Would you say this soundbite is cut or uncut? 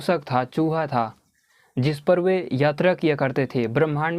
uncut